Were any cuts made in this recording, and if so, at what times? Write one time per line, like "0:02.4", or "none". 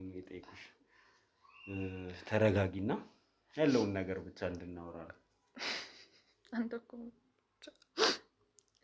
none